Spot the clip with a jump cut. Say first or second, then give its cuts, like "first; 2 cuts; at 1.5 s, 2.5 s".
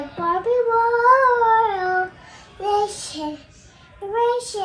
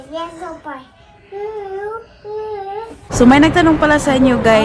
second; 1 cut; at 3.1 s